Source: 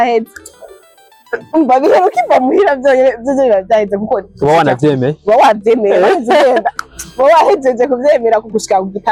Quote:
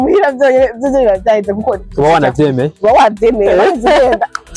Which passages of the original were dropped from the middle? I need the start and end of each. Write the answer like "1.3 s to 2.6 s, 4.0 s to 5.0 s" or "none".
none